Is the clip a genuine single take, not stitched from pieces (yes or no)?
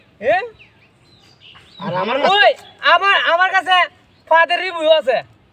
yes